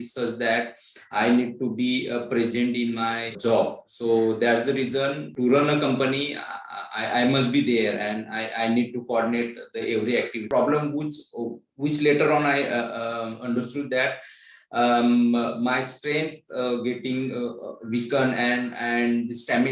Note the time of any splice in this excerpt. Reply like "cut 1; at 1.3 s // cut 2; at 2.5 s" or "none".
cut 1; at 3.4 s // cut 2; at 5.3 s // cut 3; at 10.5 s